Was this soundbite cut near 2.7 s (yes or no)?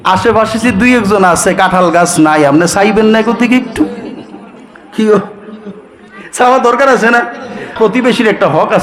no